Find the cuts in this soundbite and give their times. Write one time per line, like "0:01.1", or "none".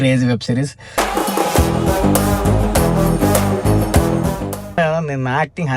0:04.8

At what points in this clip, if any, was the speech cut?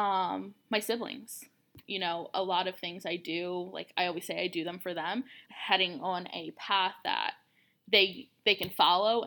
0:01.7
0:05.4

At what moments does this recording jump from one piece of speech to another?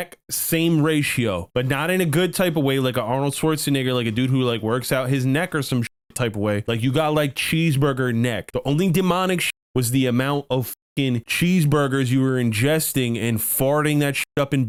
none

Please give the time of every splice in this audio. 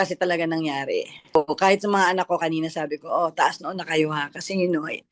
0:01.4

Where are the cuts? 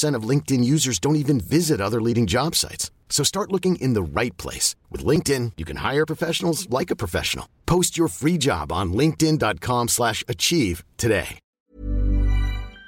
0:11.4

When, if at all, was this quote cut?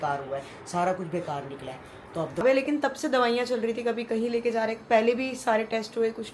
0:02.4

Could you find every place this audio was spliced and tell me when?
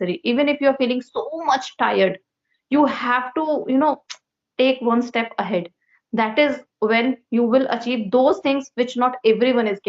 none

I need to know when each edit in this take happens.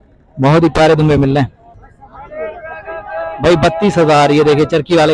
0:01.6

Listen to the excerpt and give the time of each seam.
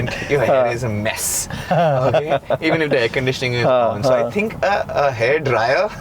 none

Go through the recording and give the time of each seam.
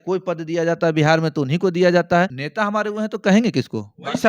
0:02.4

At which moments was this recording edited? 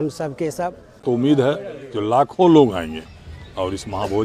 0:01.0

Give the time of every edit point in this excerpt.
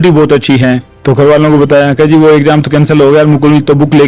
0:00.9

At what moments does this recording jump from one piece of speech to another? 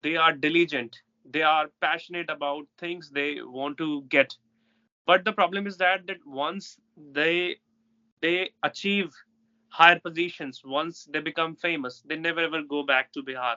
none

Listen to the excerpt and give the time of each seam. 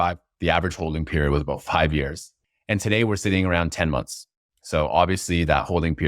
0:02.2

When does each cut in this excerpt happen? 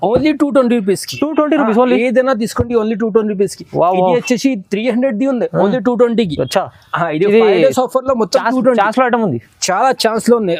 none

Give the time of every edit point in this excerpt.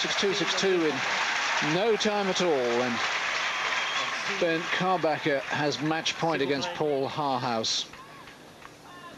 none

